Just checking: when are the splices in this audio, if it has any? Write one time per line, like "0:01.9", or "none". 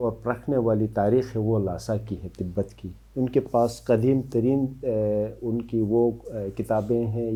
none